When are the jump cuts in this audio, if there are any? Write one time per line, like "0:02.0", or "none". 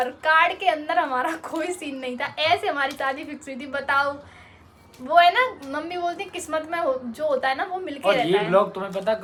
none